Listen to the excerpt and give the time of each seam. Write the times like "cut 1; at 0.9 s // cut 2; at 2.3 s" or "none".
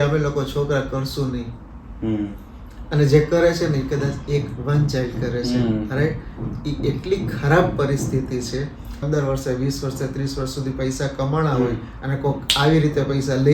cut 1; at 9.0 s